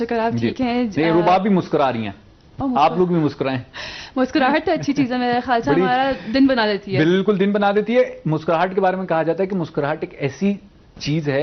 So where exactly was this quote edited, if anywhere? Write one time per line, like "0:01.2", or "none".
none